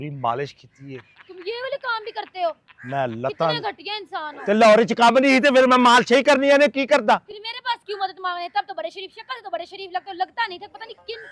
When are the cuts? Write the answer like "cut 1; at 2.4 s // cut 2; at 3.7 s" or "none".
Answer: none